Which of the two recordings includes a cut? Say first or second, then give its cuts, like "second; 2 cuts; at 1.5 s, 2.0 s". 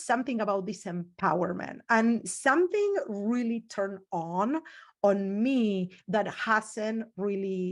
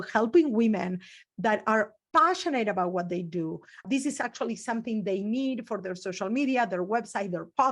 second; 1 cut; at 3.8 s